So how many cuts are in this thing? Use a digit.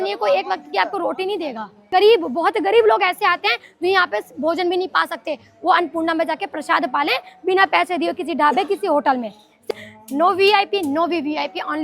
2